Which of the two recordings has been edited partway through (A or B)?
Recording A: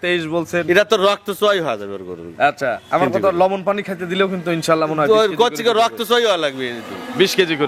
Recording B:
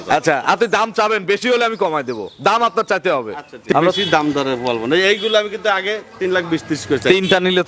B